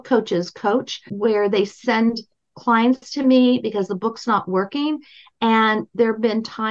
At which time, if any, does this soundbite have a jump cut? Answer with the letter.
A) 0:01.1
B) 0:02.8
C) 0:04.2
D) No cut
A